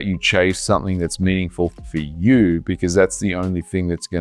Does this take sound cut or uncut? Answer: uncut